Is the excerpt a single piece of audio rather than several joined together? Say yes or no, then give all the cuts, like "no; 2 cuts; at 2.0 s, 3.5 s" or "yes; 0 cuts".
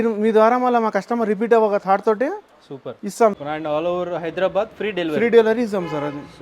no; 1 cut; at 3.4 s